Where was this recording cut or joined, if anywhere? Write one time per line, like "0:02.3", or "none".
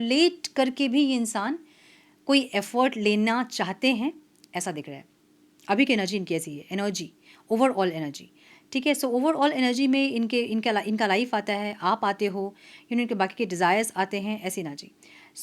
none